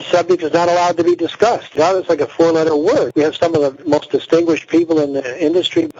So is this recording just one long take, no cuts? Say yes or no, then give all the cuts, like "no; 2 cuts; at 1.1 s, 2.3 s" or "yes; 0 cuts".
yes; 0 cuts